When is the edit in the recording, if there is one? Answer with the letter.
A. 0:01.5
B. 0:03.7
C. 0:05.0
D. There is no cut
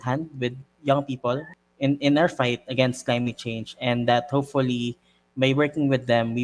A